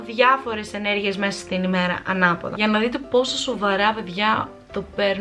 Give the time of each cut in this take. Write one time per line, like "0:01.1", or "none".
0:02.5